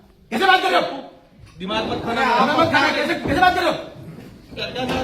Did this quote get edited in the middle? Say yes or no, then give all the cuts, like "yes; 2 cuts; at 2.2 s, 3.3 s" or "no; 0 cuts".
no; 0 cuts